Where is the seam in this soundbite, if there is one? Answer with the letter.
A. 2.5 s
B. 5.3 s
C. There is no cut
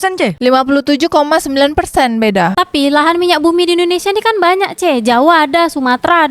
A